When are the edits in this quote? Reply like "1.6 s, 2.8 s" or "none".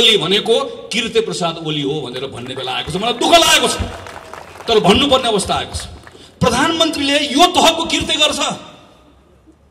none